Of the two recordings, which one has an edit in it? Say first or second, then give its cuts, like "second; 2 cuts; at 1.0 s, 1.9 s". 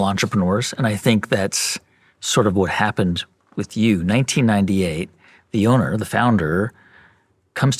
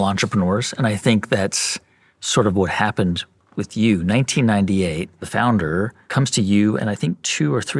second; 2 cuts; at 5.2 s, 6.0 s